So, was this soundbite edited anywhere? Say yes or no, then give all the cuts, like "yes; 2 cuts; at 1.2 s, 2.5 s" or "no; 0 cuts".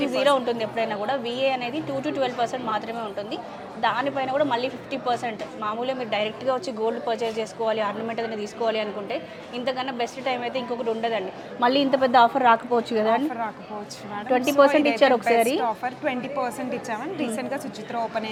no; 0 cuts